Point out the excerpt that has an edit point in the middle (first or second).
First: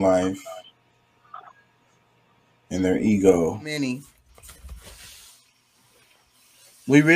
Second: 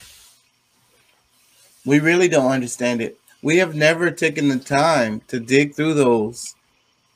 first